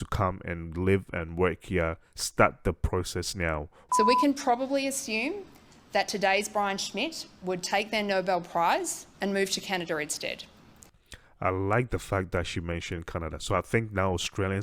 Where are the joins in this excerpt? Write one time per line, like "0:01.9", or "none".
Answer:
0:03.8